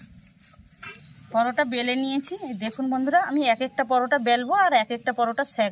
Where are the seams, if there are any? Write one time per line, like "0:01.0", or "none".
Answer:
0:01.0